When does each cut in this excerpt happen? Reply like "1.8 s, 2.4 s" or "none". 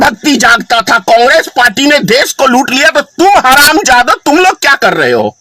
none